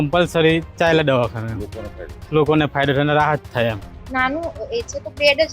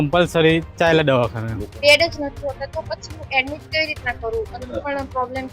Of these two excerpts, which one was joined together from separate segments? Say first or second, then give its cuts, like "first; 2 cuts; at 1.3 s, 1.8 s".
second; 2 cuts; at 1.6 s, 4.5 s